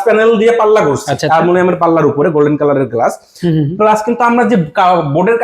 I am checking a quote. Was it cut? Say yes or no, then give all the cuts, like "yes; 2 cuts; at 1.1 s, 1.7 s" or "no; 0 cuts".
yes; 1 cut; at 1.1 s